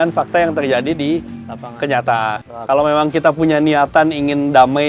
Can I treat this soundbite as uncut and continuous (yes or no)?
no